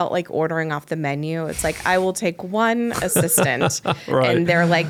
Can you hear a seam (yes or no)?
no